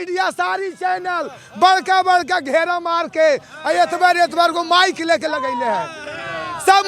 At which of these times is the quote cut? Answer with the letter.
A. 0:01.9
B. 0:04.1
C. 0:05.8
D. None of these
D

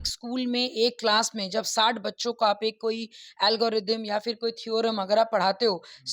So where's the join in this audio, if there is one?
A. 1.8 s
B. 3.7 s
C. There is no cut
C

